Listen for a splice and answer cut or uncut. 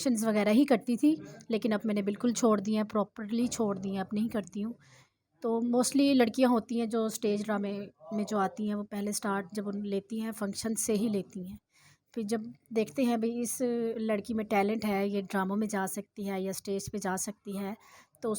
uncut